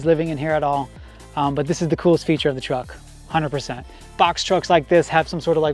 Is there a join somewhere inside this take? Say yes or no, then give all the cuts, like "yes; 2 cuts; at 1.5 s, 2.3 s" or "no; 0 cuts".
no; 0 cuts